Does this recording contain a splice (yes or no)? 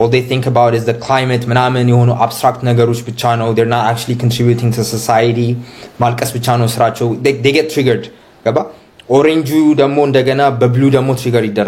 no